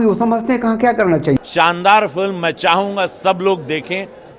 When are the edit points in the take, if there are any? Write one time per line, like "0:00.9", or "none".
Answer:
0:01.4